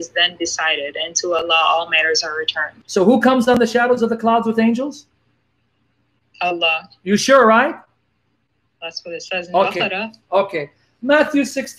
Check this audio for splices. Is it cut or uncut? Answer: cut